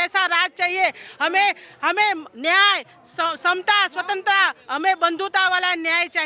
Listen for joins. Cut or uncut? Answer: uncut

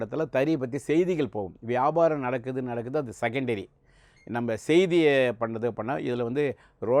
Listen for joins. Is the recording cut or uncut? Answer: uncut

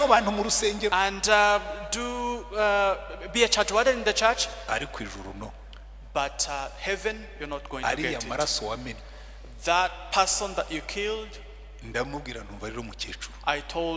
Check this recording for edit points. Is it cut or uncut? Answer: cut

